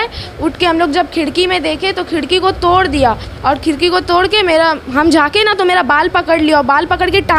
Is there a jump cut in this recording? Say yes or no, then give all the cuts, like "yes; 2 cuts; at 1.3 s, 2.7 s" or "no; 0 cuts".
no; 0 cuts